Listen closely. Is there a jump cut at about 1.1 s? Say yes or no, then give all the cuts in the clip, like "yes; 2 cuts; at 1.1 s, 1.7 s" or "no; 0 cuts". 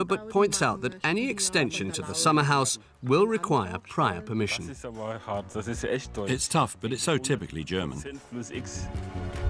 yes; 1 cut; at 1.1 s